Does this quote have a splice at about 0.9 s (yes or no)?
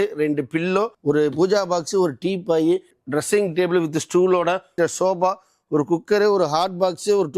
yes